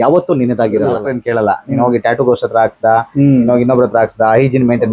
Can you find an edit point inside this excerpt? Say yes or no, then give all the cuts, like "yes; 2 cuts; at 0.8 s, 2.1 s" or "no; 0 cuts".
yes; 1 cut; at 1.1 s